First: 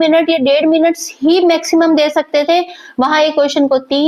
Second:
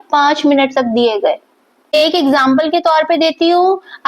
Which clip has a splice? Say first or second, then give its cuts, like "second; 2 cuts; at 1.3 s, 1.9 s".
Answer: second; 1 cut; at 1.7 s